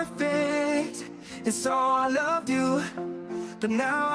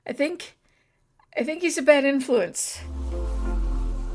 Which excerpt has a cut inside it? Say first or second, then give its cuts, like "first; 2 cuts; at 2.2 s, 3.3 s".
second; 1 cut; at 3.1 s